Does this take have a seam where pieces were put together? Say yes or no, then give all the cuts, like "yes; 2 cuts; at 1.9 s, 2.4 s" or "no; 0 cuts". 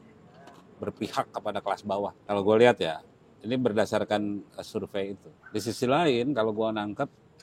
yes; 2 cuts; at 2.2 s, 5.3 s